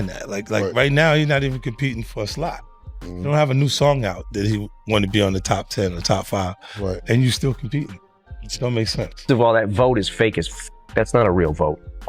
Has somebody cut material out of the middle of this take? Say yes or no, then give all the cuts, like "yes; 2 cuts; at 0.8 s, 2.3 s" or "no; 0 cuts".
yes; 1 cut; at 9.2 s